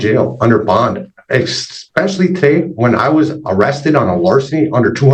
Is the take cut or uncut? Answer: uncut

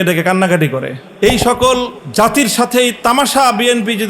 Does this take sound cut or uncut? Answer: cut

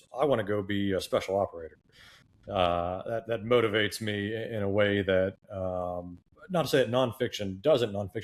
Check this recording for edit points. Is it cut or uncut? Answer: uncut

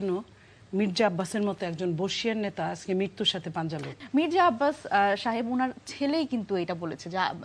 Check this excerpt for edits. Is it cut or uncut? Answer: cut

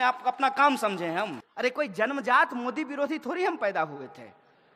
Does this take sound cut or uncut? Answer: cut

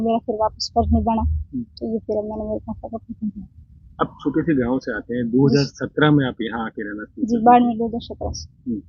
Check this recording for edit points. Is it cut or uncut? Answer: uncut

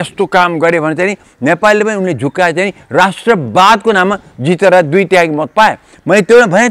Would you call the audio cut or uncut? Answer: uncut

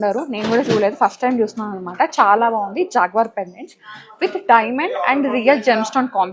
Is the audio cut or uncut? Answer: uncut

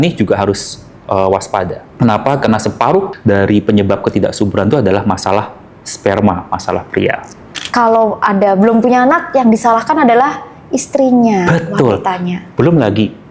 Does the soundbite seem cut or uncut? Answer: cut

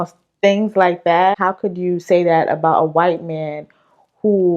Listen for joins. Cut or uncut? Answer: cut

